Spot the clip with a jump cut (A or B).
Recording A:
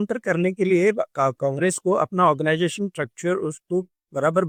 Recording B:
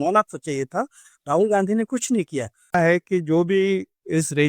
B